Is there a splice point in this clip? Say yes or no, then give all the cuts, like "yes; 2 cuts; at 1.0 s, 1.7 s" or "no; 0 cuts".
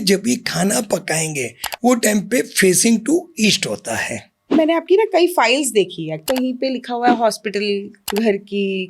yes; 3 cuts; at 4.5 s, 6.2 s, 8.0 s